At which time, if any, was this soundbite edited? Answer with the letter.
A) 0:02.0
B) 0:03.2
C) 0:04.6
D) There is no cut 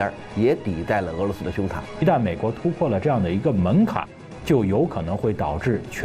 A